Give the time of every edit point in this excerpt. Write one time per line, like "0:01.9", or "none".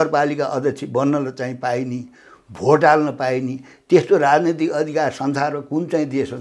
none

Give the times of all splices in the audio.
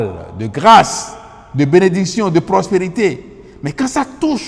none

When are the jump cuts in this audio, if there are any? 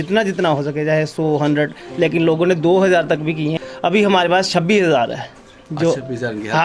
0:03.6

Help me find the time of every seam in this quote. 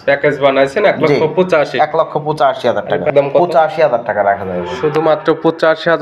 0:03.1

